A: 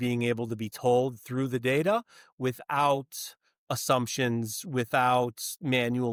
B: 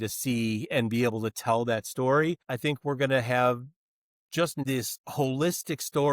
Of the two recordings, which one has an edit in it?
B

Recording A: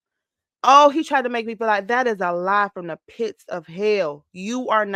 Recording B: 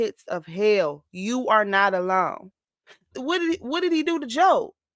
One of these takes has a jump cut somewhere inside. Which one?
B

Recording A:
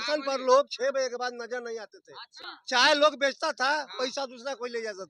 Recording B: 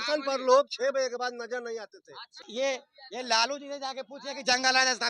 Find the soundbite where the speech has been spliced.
B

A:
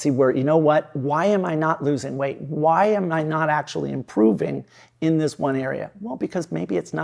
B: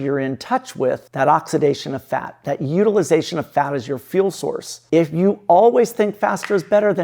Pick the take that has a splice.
B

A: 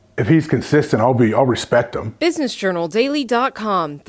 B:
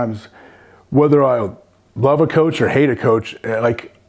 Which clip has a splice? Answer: A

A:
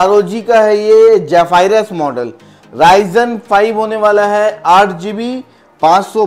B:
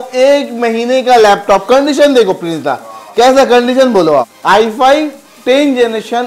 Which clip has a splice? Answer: B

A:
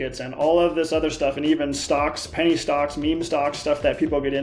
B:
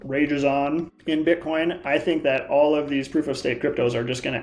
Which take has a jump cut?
B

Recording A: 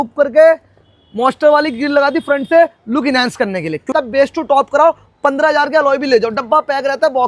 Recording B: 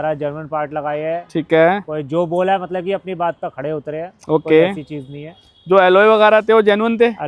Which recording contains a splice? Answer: A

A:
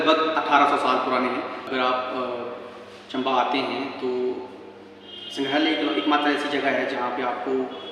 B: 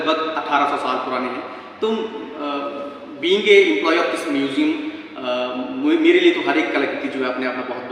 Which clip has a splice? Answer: A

